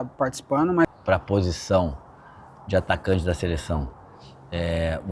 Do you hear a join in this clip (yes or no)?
yes